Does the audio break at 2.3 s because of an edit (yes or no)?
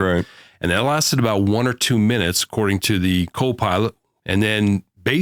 no